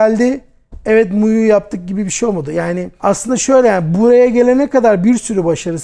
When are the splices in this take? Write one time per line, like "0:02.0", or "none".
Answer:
0:02.9